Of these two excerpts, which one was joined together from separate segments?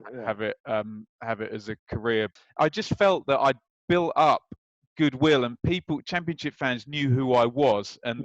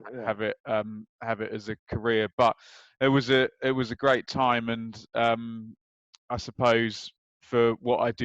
first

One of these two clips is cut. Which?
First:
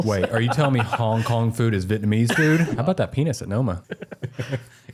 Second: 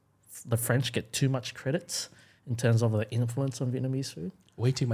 first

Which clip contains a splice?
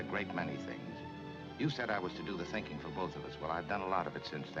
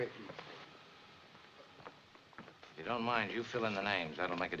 first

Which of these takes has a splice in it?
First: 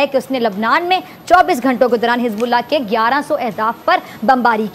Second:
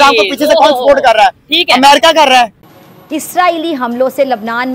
second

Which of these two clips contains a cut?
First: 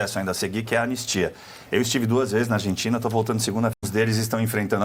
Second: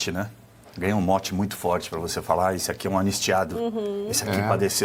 first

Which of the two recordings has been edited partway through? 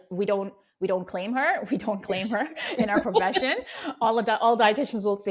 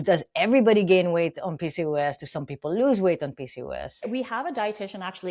second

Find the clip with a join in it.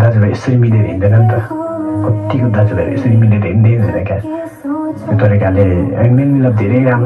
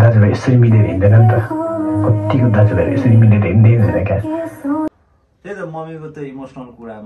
second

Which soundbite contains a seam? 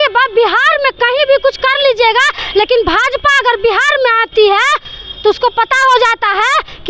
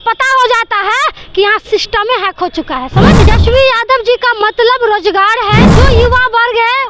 second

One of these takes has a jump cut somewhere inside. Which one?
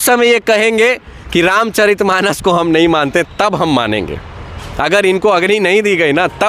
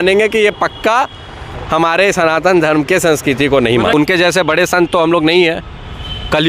second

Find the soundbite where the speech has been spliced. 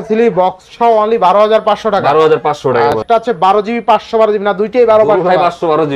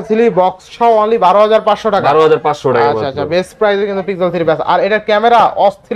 first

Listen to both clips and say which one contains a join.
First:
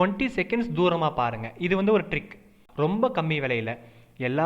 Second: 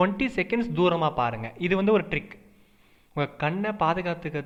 first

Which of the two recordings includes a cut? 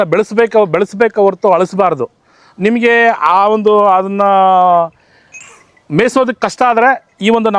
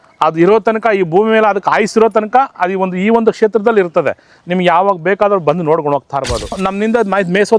second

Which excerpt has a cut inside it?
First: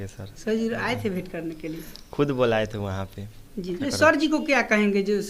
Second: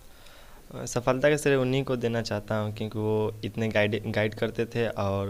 first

